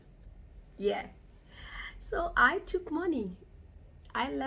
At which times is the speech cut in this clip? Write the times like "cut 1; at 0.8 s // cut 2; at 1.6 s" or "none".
none

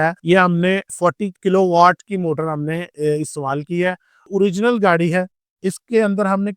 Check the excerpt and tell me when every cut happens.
cut 1; at 4.2 s

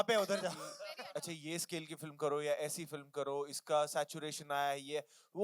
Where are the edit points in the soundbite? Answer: cut 1; at 0.9 s

